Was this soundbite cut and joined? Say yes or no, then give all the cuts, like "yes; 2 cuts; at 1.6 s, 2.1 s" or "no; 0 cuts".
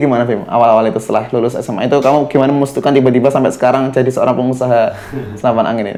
no; 0 cuts